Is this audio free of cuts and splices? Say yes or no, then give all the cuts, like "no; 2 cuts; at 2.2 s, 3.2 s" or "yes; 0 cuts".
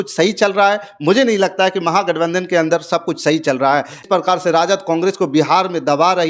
no; 1 cut; at 4.0 s